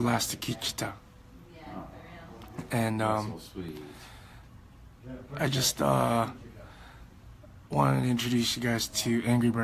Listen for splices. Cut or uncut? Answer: uncut